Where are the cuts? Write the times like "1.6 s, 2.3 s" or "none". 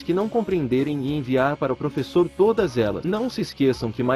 3.0 s